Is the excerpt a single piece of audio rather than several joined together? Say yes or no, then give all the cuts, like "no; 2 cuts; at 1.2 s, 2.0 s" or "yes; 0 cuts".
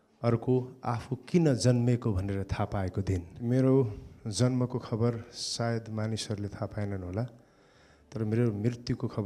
no; 1 cut; at 3.3 s